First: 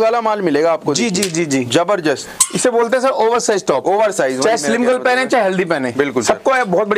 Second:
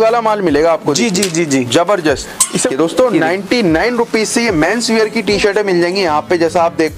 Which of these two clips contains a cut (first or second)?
second